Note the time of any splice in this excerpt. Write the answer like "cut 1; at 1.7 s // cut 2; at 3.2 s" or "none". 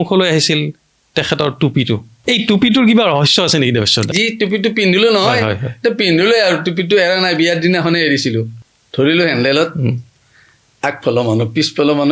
cut 1; at 2.1 s // cut 2; at 4.1 s // cut 3; at 8.6 s